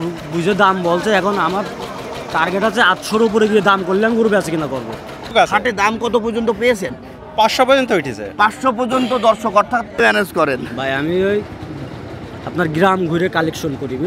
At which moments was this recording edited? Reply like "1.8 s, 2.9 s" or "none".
5.3 s, 10.0 s